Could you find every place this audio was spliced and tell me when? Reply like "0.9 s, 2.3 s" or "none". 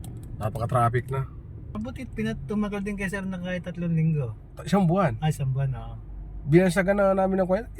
1.7 s